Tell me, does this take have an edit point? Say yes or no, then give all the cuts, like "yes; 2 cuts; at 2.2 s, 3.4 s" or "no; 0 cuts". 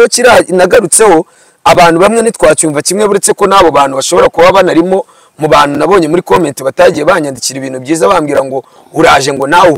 no; 0 cuts